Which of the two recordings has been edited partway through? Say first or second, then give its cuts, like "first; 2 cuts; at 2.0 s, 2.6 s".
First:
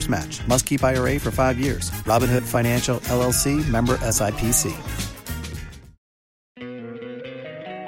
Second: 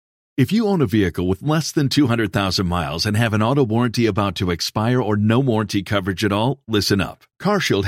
first; 1 cut; at 6.7 s